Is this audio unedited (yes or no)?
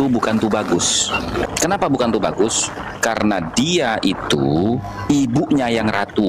no